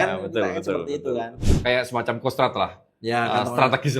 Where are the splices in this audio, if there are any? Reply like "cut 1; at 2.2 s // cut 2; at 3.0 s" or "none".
cut 1; at 1.4 s